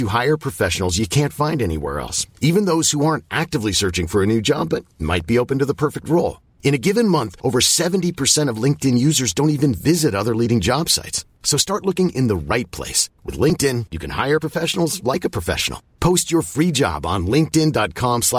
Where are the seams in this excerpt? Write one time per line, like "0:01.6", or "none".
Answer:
none